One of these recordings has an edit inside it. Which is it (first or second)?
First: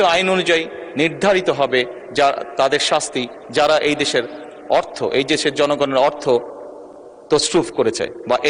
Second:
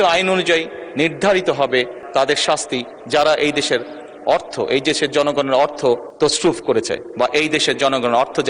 second